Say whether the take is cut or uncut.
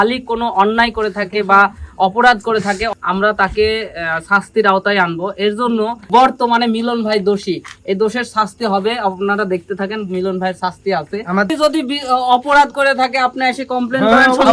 cut